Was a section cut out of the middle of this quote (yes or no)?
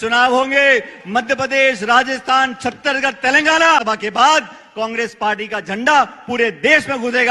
yes